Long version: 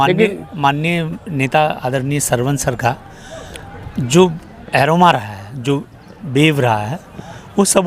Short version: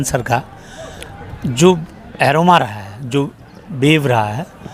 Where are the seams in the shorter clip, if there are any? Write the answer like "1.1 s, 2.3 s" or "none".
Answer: none